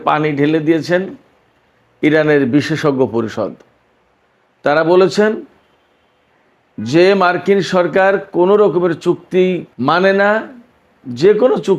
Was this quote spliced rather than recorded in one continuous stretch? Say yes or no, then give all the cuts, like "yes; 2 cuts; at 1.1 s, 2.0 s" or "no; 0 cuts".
no; 0 cuts